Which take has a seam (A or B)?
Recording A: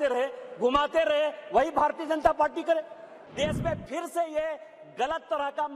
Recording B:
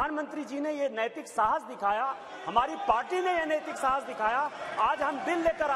A